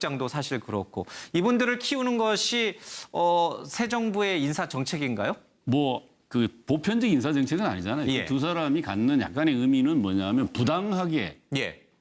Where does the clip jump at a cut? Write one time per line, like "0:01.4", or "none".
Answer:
0:09.1